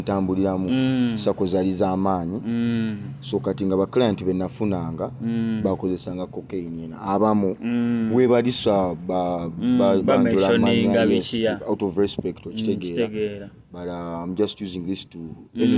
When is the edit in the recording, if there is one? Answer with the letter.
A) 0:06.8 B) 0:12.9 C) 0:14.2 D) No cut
D